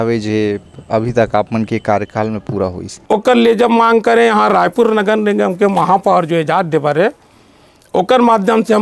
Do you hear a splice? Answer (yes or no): yes